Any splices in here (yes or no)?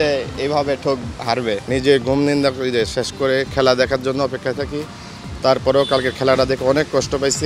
no